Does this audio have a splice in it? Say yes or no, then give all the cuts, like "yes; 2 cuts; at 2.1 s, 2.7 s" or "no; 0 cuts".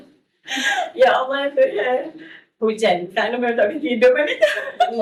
no; 0 cuts